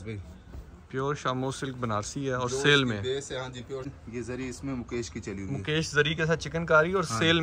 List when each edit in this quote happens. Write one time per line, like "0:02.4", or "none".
0:03.9

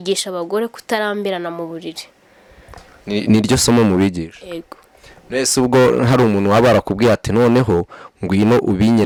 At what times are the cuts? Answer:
none

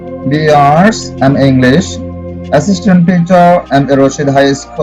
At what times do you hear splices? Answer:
none

